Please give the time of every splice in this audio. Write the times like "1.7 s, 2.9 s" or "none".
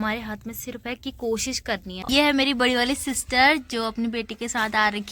1.9 s

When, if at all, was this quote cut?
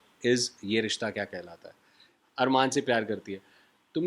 2.2 s

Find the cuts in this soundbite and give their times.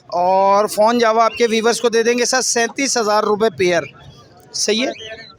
none

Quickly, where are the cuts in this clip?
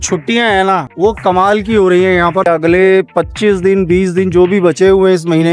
0.9 s, 2.5 s

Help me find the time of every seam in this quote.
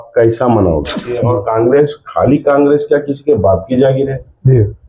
1.1 s

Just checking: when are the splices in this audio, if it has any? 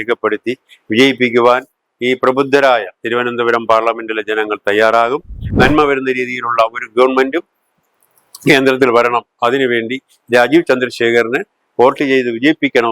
5.4 s

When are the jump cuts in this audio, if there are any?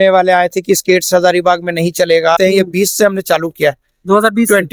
2.4 s

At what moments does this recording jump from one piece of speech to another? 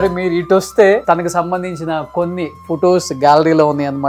1.0 s

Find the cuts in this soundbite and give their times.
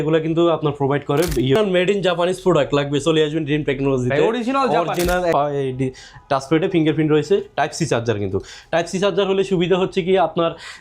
1.6 s, 5.3 s

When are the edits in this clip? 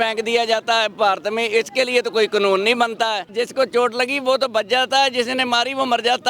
3.3 s

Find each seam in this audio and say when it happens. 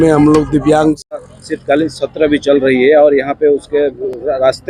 1.1 s

